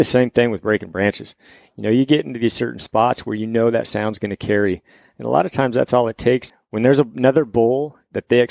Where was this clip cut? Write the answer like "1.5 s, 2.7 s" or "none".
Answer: 6.5 s